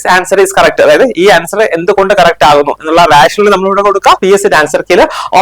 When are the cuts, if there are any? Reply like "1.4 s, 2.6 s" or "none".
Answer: 4.2 s